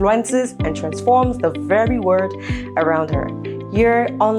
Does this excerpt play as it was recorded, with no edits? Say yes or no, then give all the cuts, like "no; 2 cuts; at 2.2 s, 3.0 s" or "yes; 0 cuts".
yes; 0 cuts